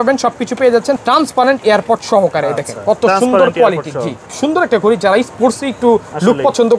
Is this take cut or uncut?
cut